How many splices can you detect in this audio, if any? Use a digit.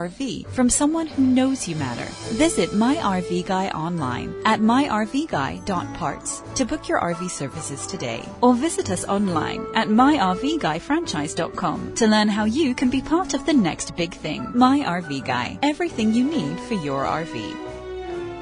1